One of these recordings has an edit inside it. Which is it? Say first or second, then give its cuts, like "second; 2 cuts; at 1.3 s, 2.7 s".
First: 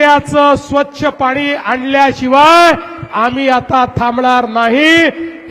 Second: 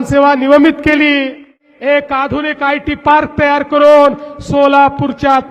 second; 1 cut; at 1.7 s